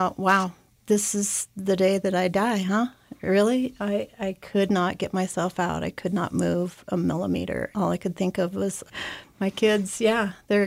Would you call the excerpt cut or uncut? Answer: cut